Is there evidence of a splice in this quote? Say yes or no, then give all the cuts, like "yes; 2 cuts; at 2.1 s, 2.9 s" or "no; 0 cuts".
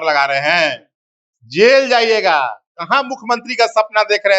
no; 0 cuts